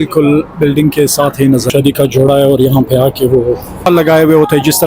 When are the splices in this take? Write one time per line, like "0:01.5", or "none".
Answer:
0:01.7
0:03.9